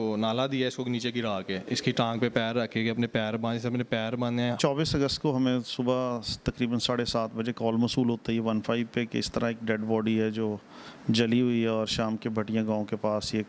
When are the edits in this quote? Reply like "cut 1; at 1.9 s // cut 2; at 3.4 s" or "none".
cut 1; at 1.6 s // cut 2; at 4.6 s

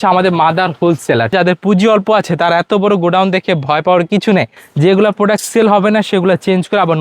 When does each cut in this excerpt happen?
cut 1; at 1.3 s // cut 2; at 4.6 s

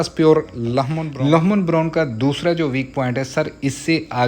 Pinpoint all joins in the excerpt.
cut 1; at 1.0 s

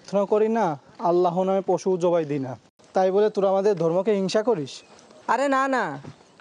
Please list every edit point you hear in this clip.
none

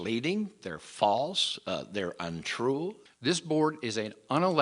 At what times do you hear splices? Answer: cut 1; at 3.0 s

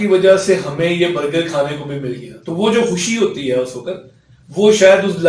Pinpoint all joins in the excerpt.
none

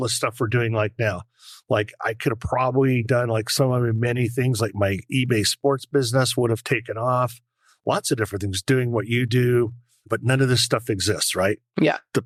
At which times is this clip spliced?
none

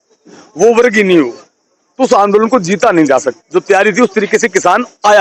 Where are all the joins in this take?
cut 1; at 3.4 s

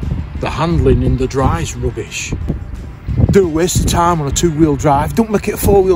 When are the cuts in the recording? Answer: cut 1; at 2.3 s

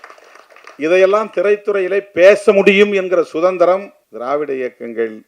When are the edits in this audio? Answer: cut 1; at 4.0 s

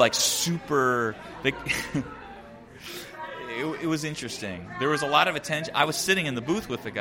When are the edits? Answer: none

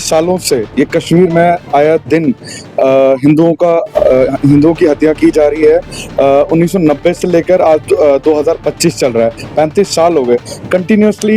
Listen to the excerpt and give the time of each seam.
none

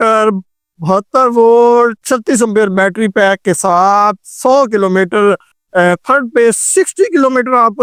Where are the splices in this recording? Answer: cut 1; at 5.5 s

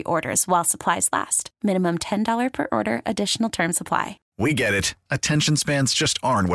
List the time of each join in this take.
cut 1; at 4.2 s

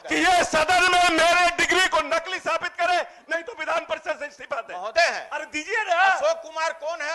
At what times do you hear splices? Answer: cut 1; at 4.9 s

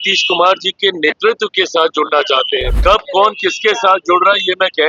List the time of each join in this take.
cut 1; at 2.7 s

